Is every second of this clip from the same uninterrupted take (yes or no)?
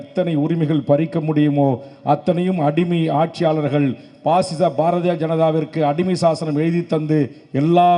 yes